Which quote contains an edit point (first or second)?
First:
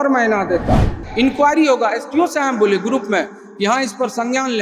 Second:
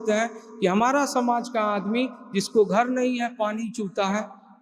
first